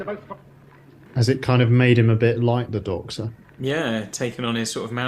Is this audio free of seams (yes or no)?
no